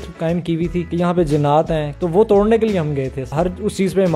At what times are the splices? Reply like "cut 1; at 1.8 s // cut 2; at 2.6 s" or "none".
cut 1; at 0.8 s // cut 2; at 1.9 s // cut 3; at 3.3 s